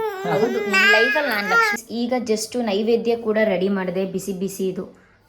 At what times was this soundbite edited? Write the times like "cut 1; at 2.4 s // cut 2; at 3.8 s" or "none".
cut 1; at 1.8 s